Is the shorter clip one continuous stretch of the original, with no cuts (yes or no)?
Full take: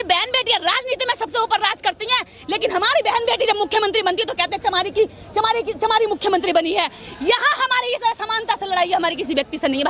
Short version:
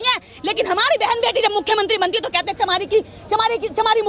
yes